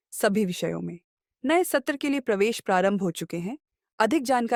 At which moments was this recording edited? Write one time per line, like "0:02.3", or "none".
none

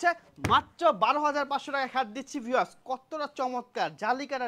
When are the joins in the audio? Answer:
none

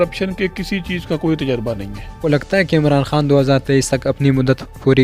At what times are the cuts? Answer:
0:02.3

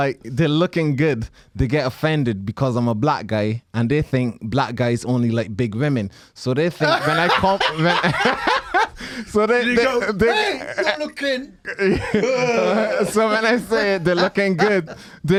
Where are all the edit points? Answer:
none

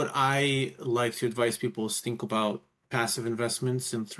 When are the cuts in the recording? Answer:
none

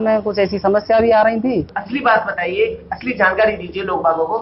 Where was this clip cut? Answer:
0:01.8

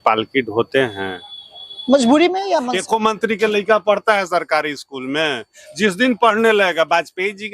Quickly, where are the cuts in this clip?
0:02.8

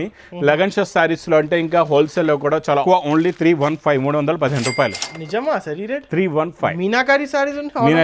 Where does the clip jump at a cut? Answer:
0:02.8

